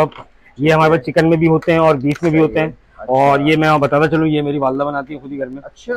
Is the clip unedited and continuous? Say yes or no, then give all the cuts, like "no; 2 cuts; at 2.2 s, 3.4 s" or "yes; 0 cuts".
yes; 0 cuts